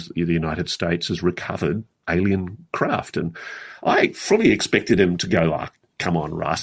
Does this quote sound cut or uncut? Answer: cut